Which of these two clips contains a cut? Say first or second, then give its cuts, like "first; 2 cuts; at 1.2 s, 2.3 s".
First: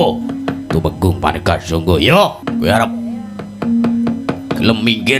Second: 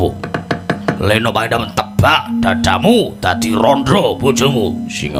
first; 1 cut; at 2.4 s